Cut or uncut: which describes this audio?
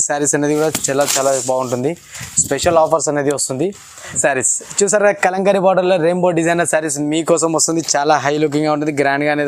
cut